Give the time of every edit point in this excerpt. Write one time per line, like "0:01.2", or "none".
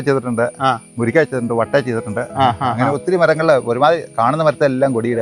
none